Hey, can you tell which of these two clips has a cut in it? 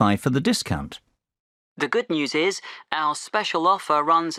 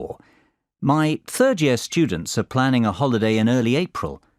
second; 1 cut; at 2.9 s

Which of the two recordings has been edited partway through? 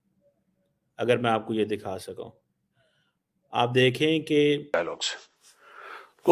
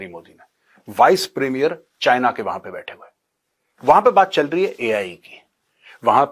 first; 1 cut; at 4.8 s

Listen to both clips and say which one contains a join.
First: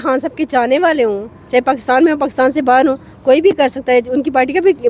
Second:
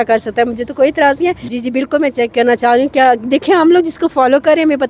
second; 1 cut; at 1.4 s

